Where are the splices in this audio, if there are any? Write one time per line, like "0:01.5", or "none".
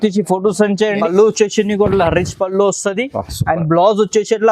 0:01.0

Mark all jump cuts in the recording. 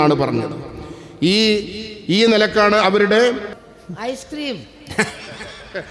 0:03.5

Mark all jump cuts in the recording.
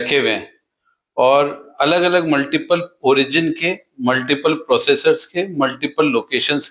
none

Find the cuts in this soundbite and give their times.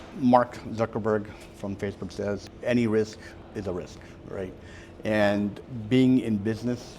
0:02.4

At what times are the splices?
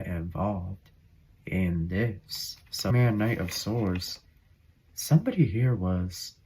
0:02.9

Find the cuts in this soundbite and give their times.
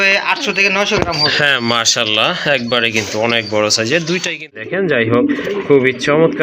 0:04.6

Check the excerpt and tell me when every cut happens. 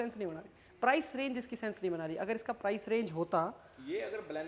none

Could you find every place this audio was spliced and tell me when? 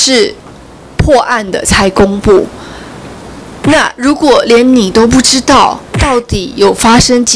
none

